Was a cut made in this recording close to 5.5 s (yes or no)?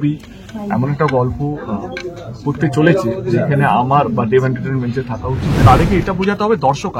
yes